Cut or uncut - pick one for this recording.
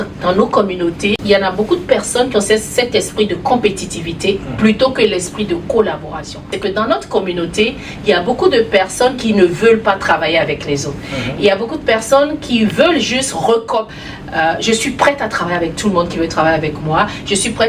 cut